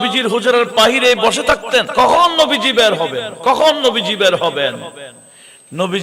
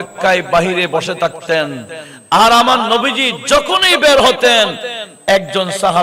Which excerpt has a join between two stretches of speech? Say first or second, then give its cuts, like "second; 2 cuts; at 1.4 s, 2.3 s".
first; 1 cut; at 1.9 s